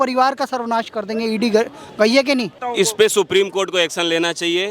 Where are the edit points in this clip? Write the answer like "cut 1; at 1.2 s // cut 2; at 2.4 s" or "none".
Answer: cut 1; at 2.6 s